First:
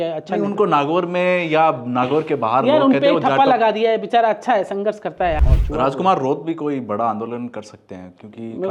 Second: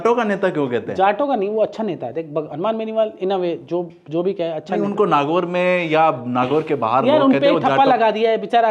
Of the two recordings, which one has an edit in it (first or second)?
first